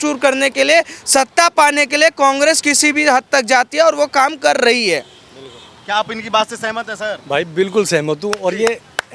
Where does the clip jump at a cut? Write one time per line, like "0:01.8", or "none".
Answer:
none